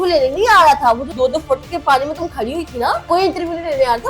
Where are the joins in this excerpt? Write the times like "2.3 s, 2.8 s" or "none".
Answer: 1.1 s, 3.1 s